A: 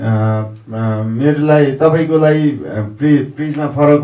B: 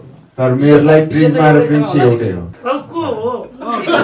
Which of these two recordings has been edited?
B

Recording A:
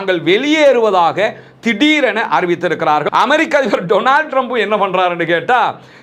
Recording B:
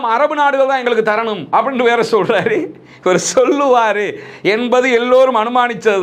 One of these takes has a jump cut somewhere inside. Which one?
A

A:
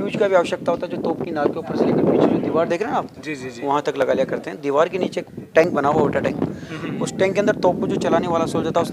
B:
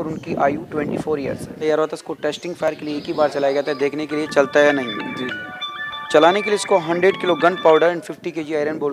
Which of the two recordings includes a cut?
B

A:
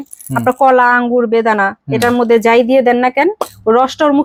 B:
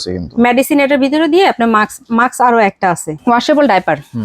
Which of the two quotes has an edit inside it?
B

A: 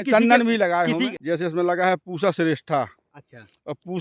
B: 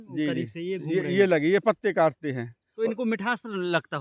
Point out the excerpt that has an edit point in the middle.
A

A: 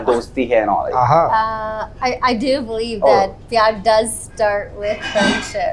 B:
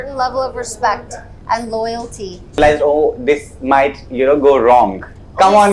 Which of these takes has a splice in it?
B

